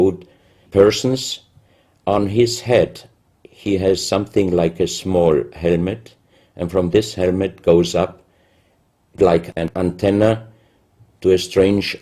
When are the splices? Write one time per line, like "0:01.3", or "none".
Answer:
0:02.6